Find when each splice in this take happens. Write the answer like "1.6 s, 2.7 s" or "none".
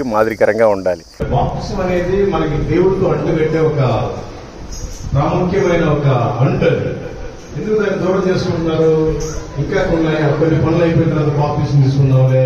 1.2 s

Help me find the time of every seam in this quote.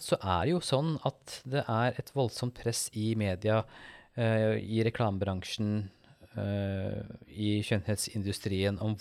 none

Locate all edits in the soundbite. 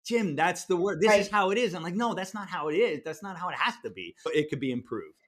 4.3 s

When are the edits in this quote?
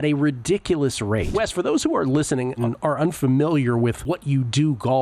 1.3 s, 2.7 s, 4.0 s

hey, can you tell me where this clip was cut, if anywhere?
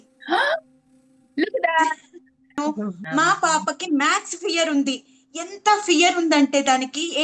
2.6 s

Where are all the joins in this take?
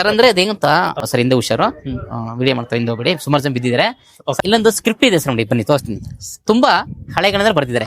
1.0 s, 4.4 s

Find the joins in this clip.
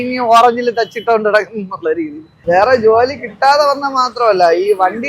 2.3 s

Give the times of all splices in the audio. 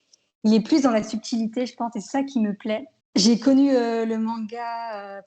2.9 s

